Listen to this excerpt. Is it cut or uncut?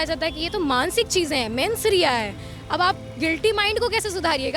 uncut